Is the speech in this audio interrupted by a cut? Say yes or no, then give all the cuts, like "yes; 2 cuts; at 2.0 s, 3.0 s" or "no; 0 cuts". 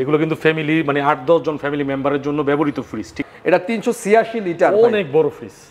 yes; 1 cut; at 3.2 s